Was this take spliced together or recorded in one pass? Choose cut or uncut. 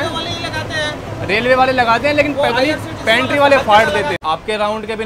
cut